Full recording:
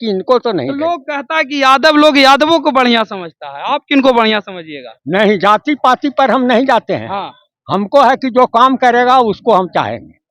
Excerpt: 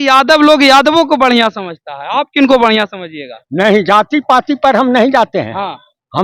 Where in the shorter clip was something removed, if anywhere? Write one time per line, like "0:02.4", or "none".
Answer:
none